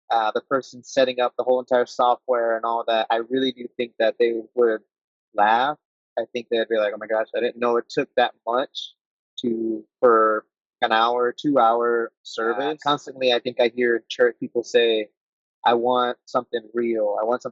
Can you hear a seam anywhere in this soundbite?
yes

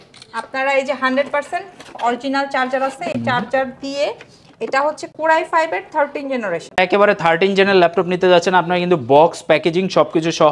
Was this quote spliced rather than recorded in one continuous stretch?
no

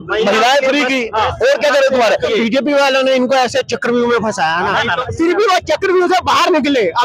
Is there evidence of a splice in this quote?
yes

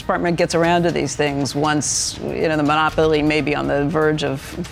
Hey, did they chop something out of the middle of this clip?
no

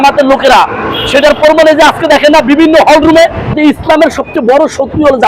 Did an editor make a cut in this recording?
yes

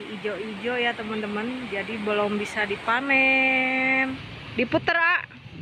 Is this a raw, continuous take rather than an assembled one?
no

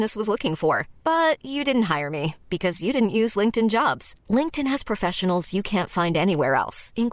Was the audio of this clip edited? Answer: no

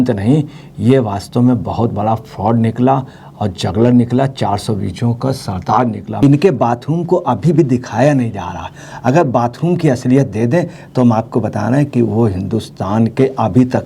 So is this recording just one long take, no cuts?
no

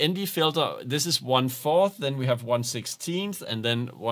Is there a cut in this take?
no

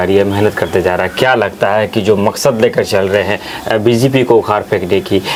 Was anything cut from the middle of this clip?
no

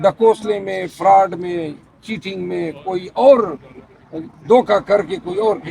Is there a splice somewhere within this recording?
no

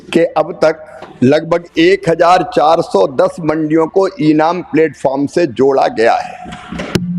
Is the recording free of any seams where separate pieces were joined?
no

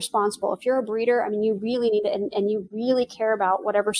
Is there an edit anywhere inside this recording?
no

